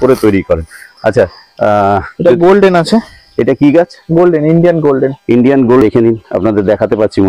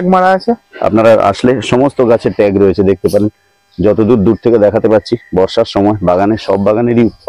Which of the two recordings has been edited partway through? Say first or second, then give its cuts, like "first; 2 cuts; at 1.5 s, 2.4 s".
first; 1 cut; at 5.8 s